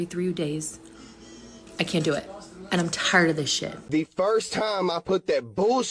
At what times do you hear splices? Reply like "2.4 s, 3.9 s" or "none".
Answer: 3.7 s